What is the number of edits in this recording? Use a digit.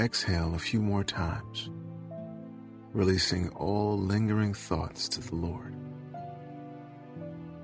3